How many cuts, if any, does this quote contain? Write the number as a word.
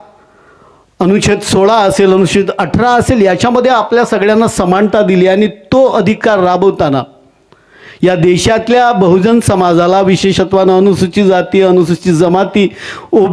zero